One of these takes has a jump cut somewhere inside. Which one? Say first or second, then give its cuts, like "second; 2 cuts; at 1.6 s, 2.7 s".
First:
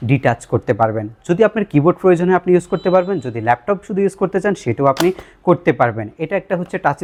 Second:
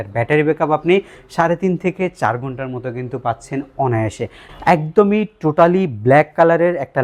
second; 1 cut; at 4.4 s